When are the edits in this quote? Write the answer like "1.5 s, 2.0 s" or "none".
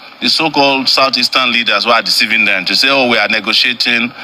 none